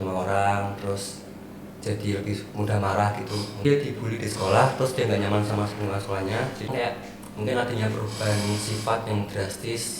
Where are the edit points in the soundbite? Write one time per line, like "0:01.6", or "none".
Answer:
0:03.6
0:06.7